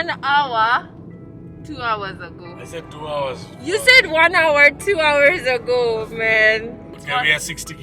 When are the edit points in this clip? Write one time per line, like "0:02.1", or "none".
0:06.9